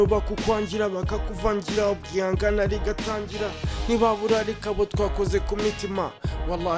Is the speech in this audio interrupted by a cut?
no; 0 cuts

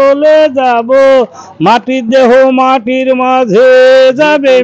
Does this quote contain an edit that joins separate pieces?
no; 0 cuts

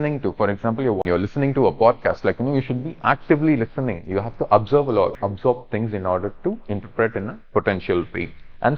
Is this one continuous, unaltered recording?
no; 2 cuts; at 1.0 s, 5.2 s

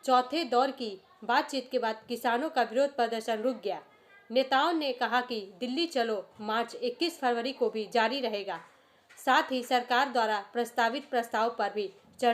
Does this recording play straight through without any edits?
yes; 0 cuts

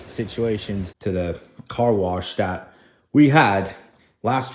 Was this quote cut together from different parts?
yes; 1 cut; at 0.9 s

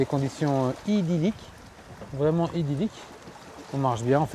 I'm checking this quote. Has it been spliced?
no; 0 cuts

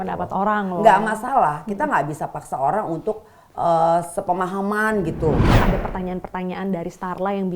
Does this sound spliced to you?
yes; 1 cut; at 5.6 s

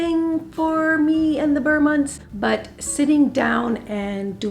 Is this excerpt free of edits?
yes; 0 cuts

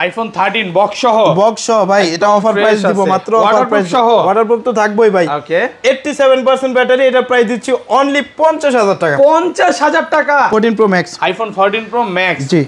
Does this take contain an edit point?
yes; 1 cut; at 10.5 s

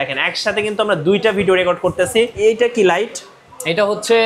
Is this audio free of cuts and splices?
no; 1 cut; at 2.4 s

